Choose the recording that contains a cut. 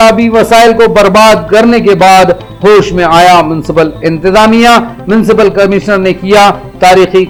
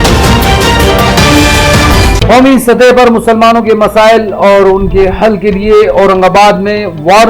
second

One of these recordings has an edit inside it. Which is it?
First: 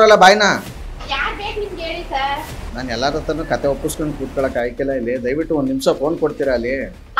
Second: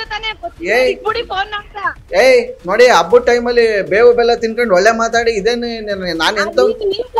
first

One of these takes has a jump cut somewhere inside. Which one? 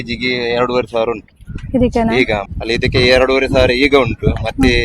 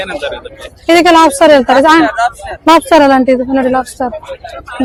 first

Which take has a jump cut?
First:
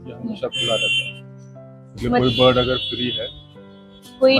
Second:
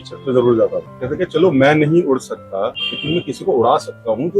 second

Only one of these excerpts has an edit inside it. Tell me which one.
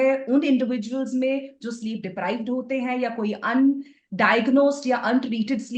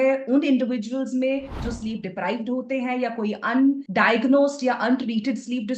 second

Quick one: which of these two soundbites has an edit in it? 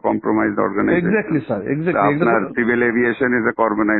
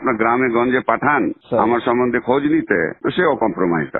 second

